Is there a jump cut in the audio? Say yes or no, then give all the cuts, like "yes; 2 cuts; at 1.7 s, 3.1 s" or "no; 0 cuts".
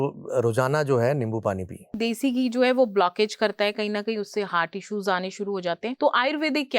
yes; 2 cuts; at 2.0 s, 5.9 s